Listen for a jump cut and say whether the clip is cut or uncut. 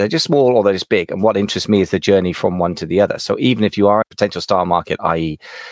cut